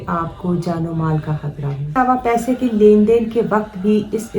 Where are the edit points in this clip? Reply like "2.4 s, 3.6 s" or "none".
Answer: 2.0 s